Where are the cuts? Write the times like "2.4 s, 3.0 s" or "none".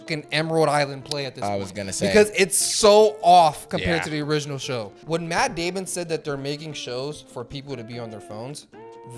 5.0 s